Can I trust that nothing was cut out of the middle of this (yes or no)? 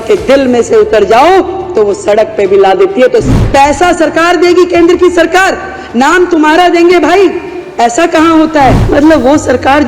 no